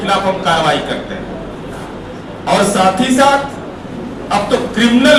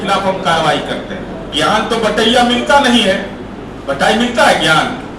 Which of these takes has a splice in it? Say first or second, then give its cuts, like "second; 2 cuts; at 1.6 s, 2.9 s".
second; 1 cut; at 1.5 s